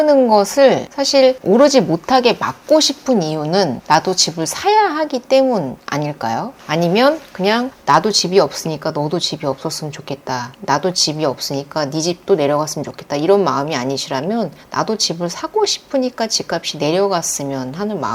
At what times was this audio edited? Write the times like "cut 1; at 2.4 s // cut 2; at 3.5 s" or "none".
none